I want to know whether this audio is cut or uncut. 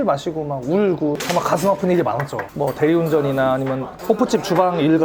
cut